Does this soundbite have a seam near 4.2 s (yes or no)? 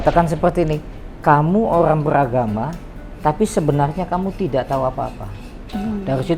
no